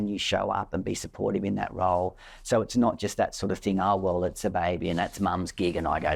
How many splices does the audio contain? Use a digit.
0